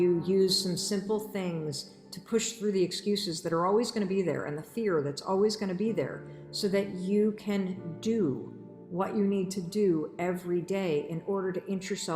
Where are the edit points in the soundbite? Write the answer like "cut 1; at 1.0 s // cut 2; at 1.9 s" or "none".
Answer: none

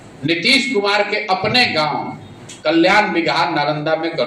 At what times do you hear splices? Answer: none

